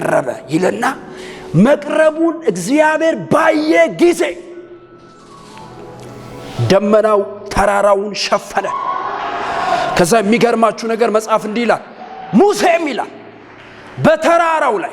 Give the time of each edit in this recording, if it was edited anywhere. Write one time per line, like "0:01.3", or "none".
none